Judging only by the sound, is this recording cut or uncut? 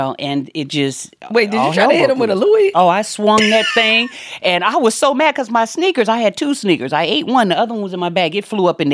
uncut